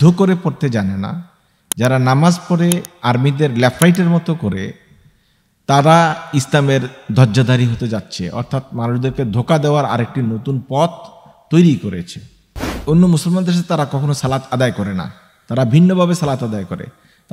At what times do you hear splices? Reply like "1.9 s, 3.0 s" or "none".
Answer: 12.8 s